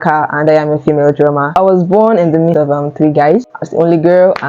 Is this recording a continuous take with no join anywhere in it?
no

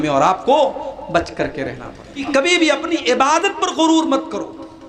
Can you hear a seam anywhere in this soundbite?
yes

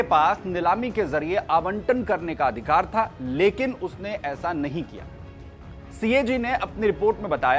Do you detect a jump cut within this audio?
no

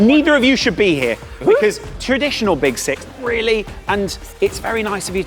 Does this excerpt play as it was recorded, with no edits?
no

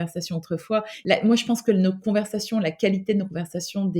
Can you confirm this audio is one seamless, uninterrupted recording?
no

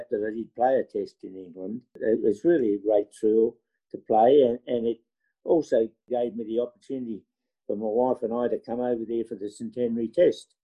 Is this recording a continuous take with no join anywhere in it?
yes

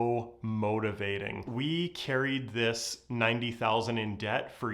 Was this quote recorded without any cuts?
no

